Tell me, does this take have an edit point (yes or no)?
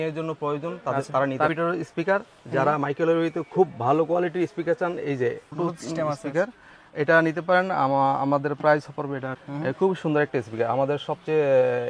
yes